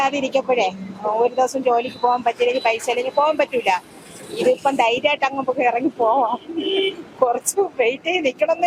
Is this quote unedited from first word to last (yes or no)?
yes